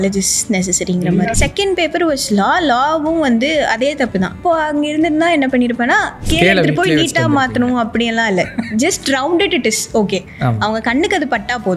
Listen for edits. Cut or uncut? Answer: cut